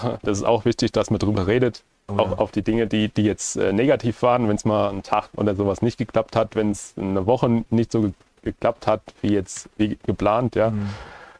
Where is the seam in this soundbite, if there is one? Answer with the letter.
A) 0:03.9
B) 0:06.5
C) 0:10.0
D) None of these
D